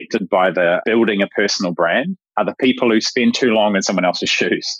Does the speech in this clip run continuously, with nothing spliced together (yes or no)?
no